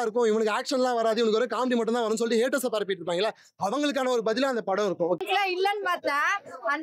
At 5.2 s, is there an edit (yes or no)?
yes